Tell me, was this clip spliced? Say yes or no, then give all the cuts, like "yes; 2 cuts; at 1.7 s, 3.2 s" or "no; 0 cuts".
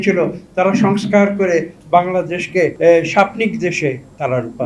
yes; 1 cut; at 2.7 s